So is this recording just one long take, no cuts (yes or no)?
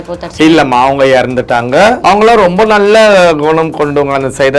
no